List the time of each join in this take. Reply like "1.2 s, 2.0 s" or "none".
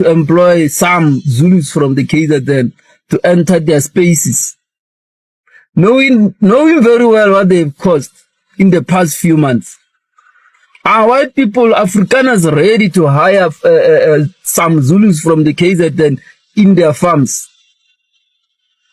none

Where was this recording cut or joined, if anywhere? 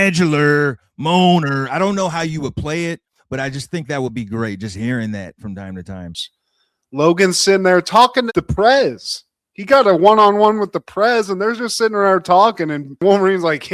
6.3 s

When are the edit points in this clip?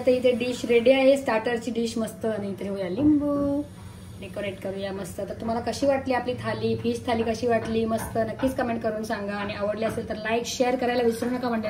none

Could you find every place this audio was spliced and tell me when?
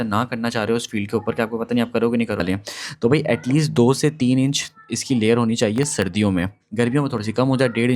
2.4 s

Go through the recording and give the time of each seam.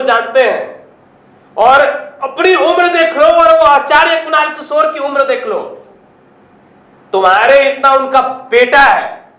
none

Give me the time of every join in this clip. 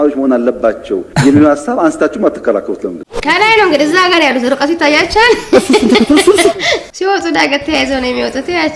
3.1 s, 6.8 s

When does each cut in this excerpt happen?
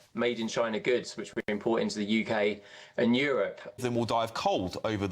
3.8 s

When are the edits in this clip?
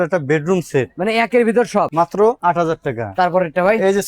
2.1 s

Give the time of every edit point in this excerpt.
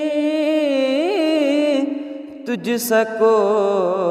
none

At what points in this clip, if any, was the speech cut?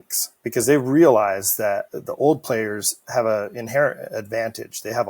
2.0 s

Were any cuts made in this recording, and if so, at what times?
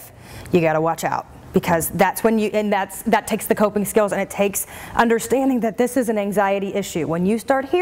none

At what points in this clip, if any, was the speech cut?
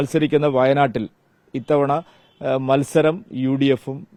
none

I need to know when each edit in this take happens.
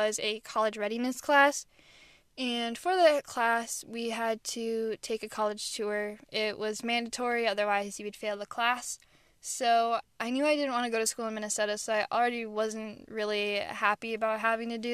none

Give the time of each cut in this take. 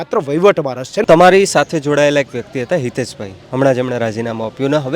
1.0 s

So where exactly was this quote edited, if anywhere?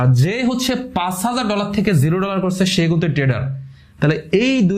none

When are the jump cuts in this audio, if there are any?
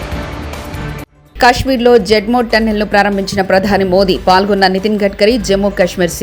0.9 s

